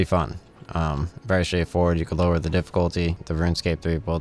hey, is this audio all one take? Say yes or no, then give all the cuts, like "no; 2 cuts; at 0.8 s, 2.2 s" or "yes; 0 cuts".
no; 1 cut; at 3.2 s